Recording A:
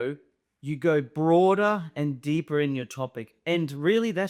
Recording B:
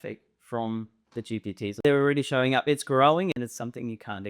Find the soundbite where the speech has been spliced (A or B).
B